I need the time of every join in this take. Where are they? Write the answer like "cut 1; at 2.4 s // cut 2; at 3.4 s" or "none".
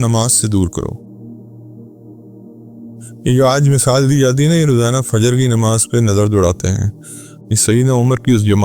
cut 1; at 1.0 s // cut 2; at 2.9 s